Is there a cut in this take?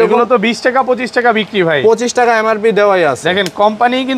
no; 0 cuts

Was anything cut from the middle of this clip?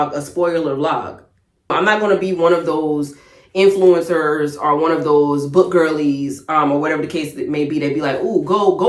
yes; 1 cut; at 1.7 s

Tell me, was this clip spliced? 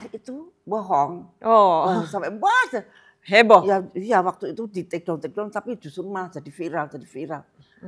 no; 0 cuts

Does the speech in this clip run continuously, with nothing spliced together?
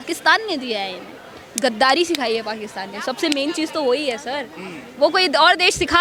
yes; 0 cuts

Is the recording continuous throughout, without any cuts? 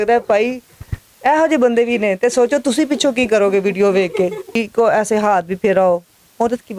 no; 1 cut; at 4.6 s

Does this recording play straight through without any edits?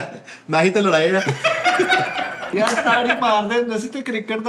no; 1 cut; at 2.4 s

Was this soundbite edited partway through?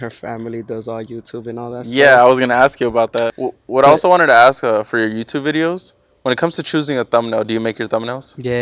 yes; 1 cut; at 3.3 s

